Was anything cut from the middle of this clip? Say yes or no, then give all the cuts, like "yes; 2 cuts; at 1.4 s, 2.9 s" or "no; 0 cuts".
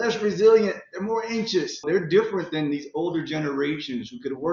yes; 1 cut; at 1.8 s